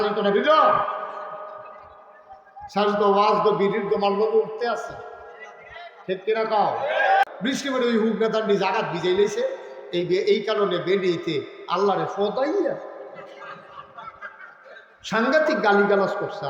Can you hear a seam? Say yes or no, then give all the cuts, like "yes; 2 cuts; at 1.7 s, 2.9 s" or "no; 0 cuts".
yes; 1 cut; at 7.2 s